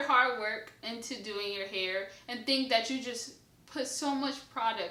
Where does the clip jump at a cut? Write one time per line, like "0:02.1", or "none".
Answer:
none